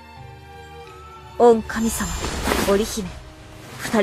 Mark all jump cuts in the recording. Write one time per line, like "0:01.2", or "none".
0:01.3